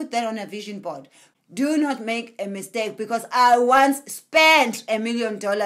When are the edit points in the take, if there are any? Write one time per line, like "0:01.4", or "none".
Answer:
0:01.2